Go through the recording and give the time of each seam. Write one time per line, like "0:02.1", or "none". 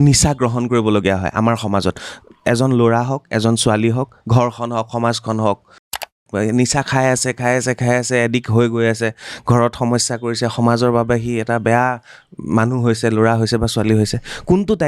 0:06.2